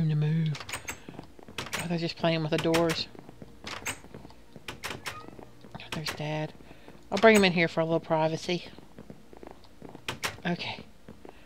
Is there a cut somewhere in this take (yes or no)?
no